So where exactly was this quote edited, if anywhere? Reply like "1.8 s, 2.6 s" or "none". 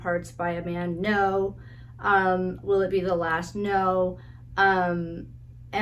none